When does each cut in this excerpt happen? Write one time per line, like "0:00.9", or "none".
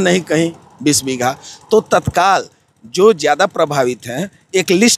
none